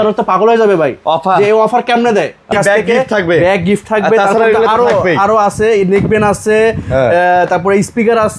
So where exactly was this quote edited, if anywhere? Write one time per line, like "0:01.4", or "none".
0:02.5